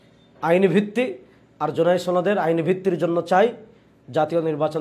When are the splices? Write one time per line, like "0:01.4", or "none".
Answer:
none